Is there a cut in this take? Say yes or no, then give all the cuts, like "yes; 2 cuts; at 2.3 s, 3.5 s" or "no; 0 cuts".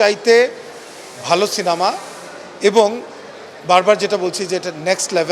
no; 0 cuts